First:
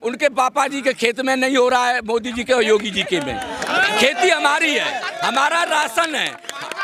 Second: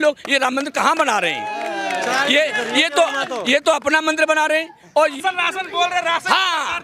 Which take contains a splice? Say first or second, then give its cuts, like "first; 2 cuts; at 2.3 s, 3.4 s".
second; 1 cut; at 5.0 s